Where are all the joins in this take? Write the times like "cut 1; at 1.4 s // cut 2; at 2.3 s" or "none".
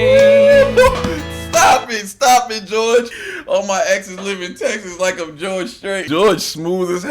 cut 1; at 3.2 s // cut 2; at 6.0 s